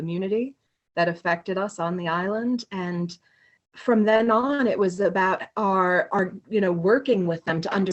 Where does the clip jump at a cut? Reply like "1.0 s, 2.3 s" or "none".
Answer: 3.6 s